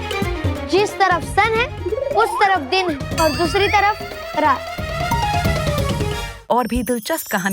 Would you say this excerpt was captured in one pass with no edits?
no; 1 cut; at 6.3 s

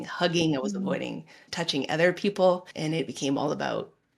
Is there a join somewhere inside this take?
yes; 2 cuts; at 1.4 s, 2.7 s

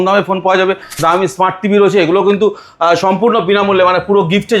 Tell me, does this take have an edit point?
yes; 1 cut; at 1.0 s

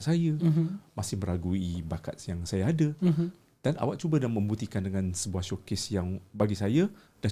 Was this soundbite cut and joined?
no; 0 cuts

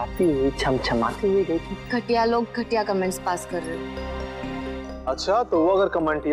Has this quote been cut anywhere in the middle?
yes; 2 cuts; at 1.8 s, 4.9 s

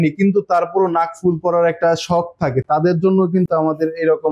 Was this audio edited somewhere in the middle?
no; 0 cuts

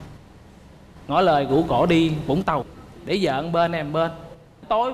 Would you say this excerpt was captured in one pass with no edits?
no; 1 cut; at 2.7 s

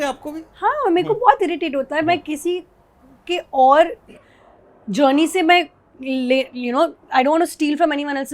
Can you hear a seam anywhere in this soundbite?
no; 0 cuts

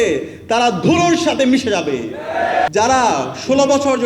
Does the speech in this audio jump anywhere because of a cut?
yes; 1 cut; at 2.7 s

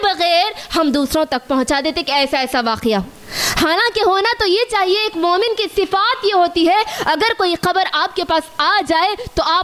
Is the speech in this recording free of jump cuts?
yes; 0 cuts

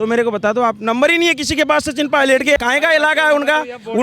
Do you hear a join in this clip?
yes; 1 cut; at 2.6 s

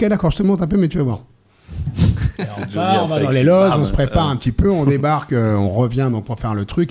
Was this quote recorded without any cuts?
yes; 0 cuts

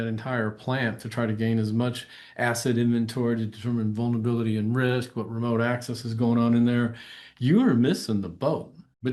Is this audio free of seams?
yes; 0 cuts

